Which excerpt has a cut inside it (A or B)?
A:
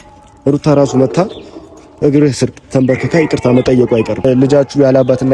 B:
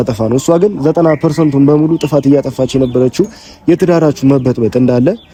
A